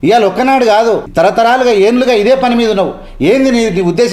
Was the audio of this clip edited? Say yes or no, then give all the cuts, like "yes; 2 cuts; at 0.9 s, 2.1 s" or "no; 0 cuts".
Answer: yes; 1 cut; at 1.1 s